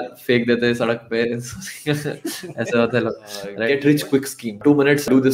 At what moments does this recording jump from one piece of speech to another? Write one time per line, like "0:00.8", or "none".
0:03.6
0:04.5